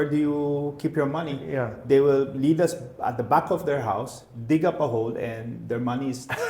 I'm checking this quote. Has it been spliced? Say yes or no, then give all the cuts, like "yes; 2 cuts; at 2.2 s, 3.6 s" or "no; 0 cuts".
no; 0 cuts